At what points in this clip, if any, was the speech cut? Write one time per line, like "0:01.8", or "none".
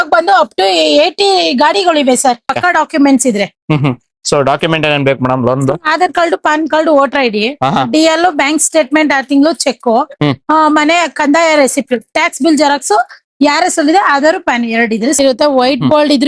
0:02.5
0:15.2